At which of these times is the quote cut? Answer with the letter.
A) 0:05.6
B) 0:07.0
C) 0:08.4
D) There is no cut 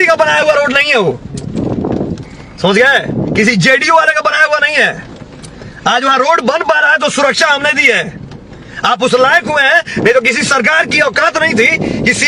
D